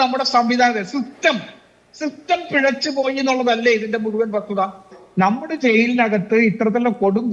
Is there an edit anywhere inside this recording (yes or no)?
yes